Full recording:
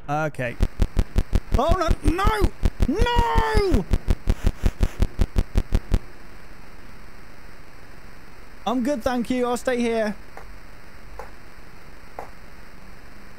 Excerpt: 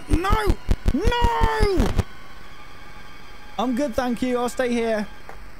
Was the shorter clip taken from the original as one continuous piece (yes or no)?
no